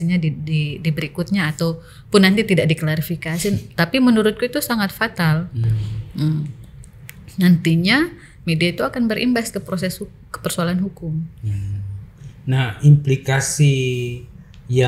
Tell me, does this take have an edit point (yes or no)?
no